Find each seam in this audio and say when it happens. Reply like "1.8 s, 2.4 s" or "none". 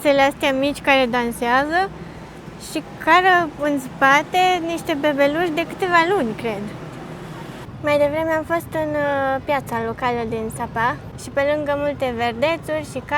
7.6 s, 11.1 s